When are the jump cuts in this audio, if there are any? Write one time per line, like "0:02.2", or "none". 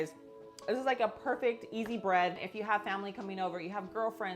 0:02.4